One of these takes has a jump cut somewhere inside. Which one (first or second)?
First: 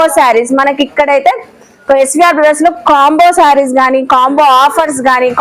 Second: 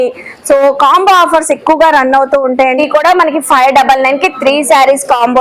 second